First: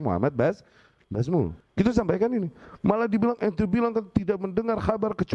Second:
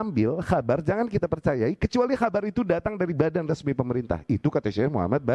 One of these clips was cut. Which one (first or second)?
first